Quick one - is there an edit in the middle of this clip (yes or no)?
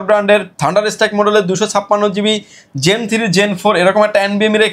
no